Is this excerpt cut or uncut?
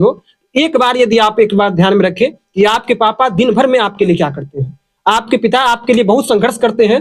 uncut